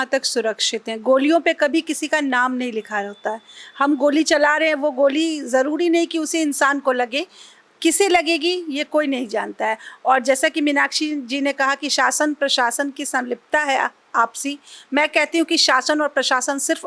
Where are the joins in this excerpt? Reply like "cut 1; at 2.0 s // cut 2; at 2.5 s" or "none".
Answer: none